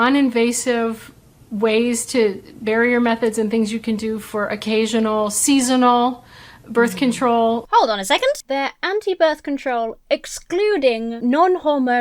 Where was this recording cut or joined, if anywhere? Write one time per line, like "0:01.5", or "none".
0:07.6
0:08.4
0:11.1